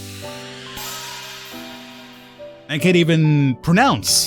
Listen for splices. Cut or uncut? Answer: uncut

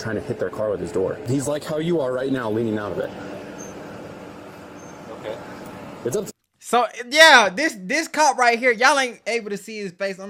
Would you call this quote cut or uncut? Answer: uncut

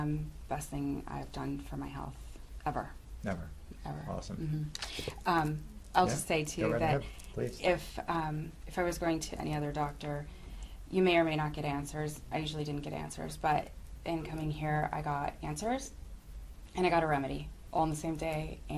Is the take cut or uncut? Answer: uncut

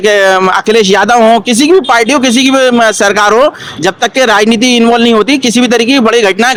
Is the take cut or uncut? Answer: uncut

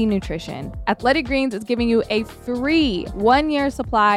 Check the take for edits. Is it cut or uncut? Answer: cut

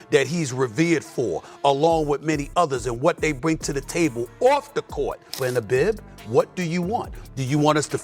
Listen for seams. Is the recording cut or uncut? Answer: cut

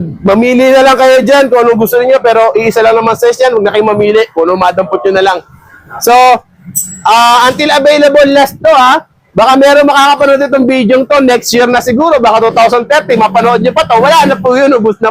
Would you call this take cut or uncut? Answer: uncut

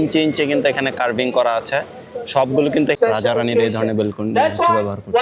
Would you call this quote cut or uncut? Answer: cut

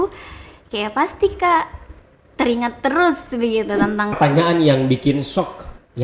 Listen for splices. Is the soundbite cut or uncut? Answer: cut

